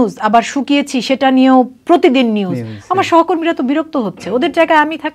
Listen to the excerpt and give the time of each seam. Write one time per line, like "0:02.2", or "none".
none